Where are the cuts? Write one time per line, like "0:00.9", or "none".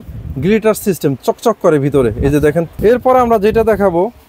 0:02.7